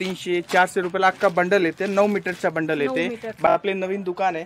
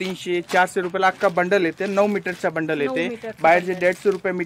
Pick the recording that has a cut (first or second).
first